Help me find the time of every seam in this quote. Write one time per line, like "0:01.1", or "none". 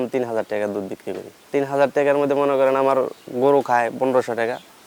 none

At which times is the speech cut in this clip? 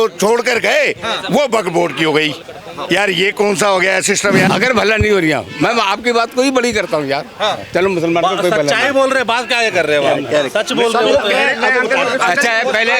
0:04.4

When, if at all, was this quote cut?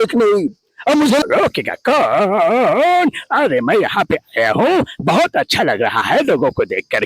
0:01.2

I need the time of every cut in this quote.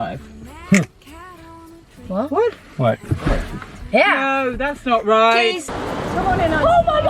0:05.7

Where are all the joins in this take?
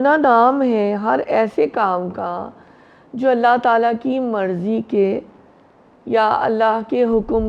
none

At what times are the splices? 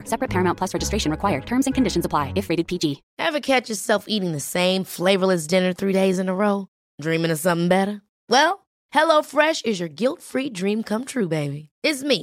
0:03.1

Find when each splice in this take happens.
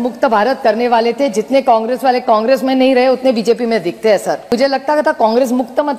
0:04.5

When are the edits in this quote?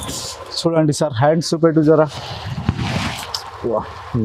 none

